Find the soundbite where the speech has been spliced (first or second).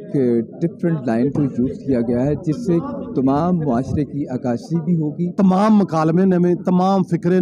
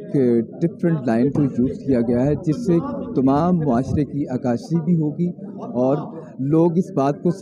first